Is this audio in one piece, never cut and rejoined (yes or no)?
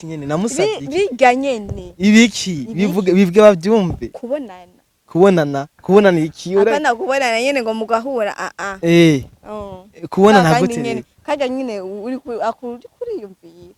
yes